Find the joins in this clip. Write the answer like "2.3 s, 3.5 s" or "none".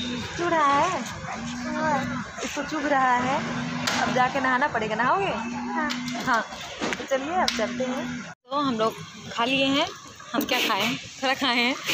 8.3 s

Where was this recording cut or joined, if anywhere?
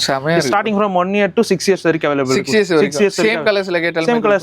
none

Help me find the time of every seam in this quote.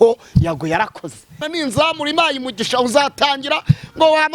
1.4 s

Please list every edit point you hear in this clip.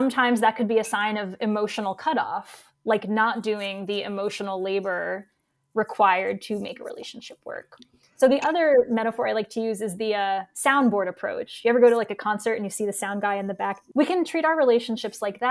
13.8 s

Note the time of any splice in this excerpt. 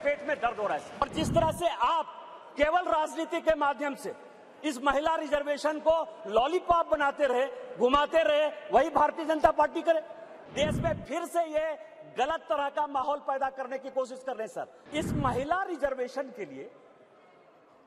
1.0 s, 10.4 s, 14.8 s

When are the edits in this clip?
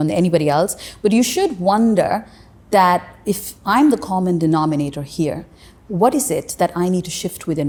none

